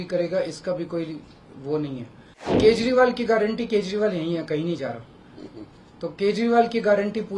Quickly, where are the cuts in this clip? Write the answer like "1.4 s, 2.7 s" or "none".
2.6 s